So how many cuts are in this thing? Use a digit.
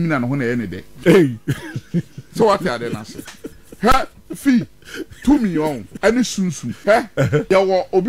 2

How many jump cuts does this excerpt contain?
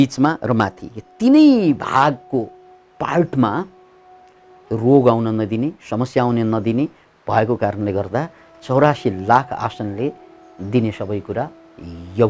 0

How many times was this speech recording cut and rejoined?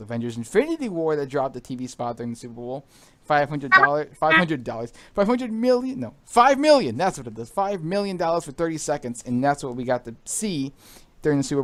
0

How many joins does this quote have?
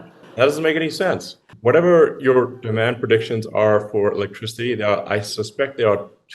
1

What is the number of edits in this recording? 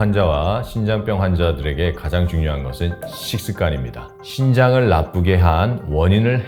0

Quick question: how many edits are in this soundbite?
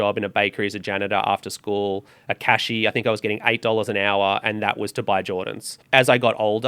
1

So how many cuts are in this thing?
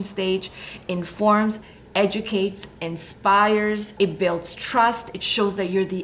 1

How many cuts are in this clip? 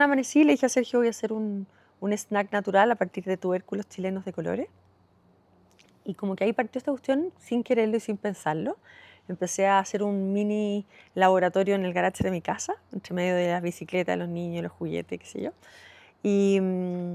0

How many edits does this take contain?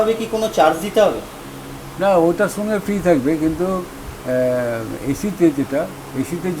0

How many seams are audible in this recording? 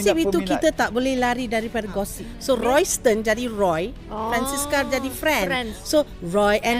1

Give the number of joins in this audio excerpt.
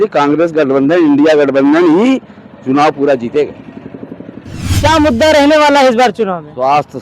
1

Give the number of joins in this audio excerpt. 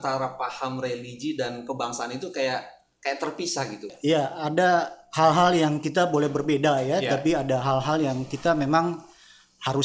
1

